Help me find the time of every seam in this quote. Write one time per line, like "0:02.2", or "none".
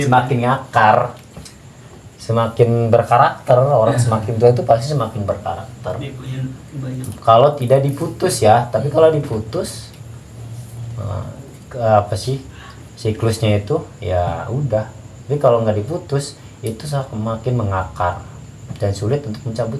none